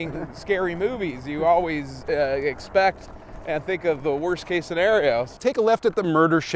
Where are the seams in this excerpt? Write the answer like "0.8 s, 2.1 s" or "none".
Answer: 5.4 s